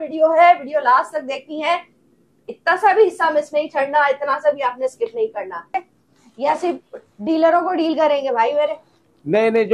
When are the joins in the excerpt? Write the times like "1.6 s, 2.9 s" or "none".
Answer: 5.8 s